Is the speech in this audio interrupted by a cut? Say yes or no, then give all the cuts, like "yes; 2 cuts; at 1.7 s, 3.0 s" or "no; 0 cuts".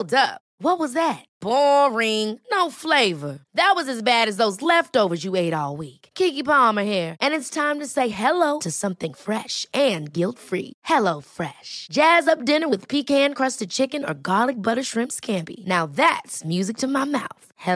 no; 0 cuts